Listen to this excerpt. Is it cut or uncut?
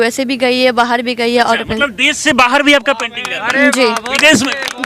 uncut